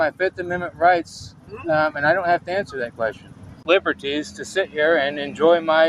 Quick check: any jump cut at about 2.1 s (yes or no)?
no